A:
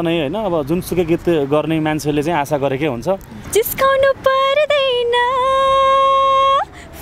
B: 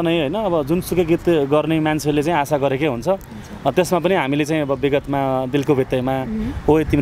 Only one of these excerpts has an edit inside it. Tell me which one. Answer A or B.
A